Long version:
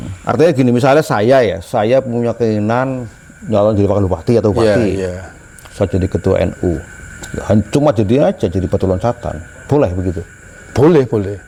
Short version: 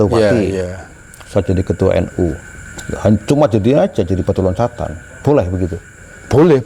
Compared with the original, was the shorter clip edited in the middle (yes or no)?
no